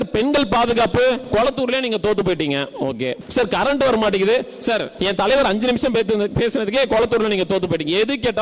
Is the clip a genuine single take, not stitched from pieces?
no; 3 cuts; at 1.2 s, 3.2 s, 4.9 s

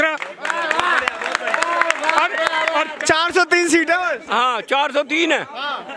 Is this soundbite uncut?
no; 1 cut; at 2.9 s

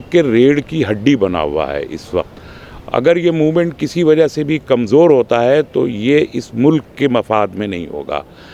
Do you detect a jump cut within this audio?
no; 0 cuts

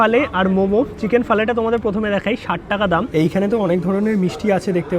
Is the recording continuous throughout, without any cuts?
no; 1 cut; at 3.1 s

